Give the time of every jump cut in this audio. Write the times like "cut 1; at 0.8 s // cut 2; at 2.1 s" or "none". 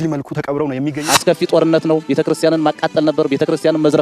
cut 1; at 1.0 s